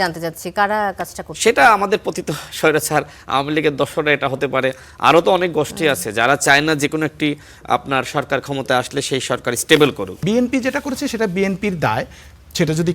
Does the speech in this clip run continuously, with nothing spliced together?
no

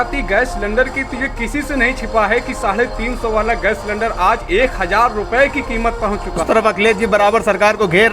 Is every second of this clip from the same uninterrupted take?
no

